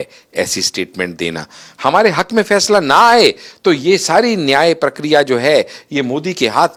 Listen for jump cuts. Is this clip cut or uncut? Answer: uncut